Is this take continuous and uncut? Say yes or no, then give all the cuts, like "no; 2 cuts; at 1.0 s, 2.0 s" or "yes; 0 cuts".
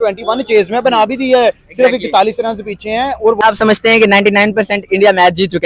no; 1 cut; at 3.4 s